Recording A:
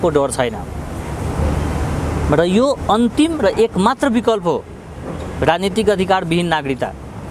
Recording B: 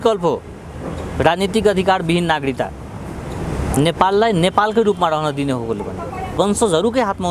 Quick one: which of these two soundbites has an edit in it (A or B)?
B